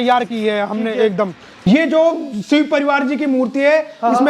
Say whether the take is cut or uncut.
cut